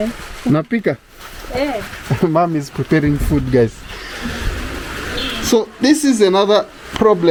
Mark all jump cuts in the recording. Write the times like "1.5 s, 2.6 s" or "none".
none